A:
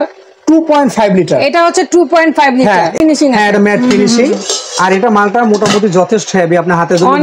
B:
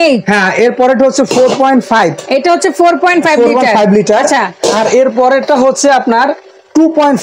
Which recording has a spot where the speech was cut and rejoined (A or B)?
A